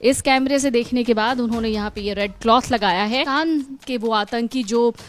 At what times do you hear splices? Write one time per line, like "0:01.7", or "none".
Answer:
0:03.3